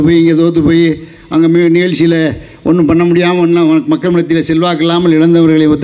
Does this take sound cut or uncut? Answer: uncut